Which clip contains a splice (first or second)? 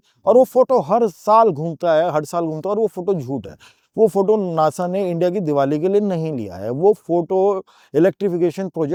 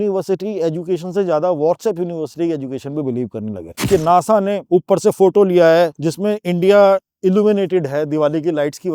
second